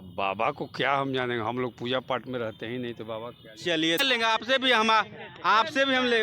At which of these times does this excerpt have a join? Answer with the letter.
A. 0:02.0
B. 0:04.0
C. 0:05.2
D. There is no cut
B